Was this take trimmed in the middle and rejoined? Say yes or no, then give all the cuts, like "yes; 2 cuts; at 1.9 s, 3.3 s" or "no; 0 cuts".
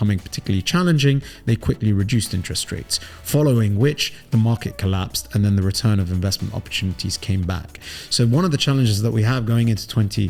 no; 0 cuts